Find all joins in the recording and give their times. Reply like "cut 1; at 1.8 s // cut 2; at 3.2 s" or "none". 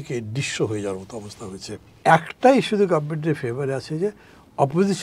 cut 1; at 2.0 s